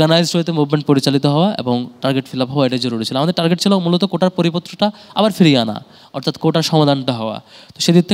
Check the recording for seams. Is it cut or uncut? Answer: uncut